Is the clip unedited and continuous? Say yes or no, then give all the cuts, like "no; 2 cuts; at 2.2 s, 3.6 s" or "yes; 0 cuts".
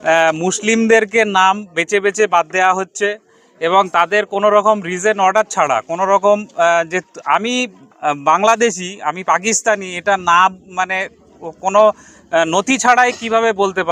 yes; 0 cuts